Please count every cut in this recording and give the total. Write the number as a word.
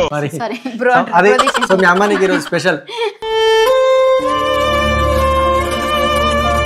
one